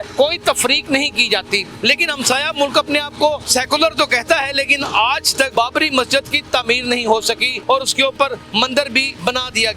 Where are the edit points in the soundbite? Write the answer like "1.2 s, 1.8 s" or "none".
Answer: 1.7 s, 3.4 s, 5.5 s, 7.5 s, 8.6 s